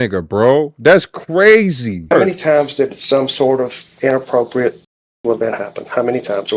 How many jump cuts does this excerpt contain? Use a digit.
1